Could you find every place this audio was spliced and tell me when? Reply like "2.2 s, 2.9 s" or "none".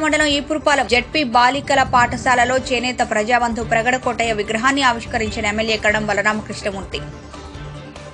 none